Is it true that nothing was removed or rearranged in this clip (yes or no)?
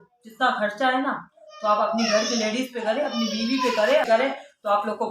no